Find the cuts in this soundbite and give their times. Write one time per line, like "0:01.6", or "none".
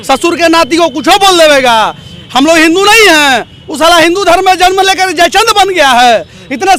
none